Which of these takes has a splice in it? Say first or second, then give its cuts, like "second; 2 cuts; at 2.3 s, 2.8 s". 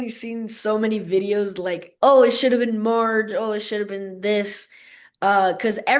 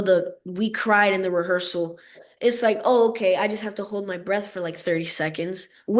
second; 1 cut; at 2.2 s